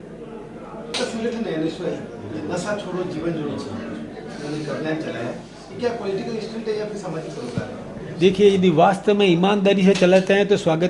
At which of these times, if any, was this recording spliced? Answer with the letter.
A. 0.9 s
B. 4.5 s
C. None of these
A